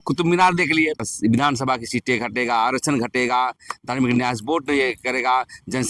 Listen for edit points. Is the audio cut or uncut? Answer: cut